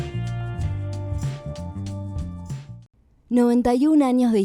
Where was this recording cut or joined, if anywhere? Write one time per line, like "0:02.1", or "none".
0:02.8